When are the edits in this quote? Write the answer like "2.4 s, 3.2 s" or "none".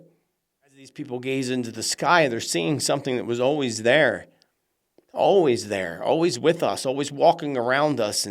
0.9 s